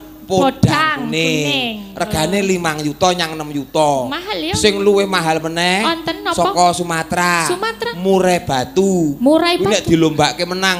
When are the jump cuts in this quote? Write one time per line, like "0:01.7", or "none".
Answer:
none